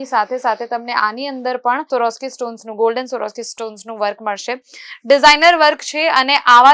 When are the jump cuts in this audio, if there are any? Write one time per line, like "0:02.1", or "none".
none